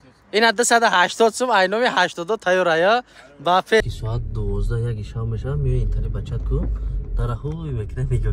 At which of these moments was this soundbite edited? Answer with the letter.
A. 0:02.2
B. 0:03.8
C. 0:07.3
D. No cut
B